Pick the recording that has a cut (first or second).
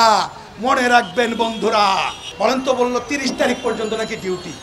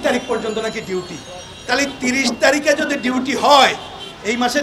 first